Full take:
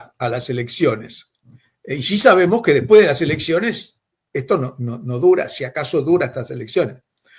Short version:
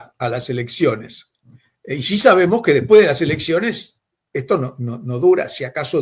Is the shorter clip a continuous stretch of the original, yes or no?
yes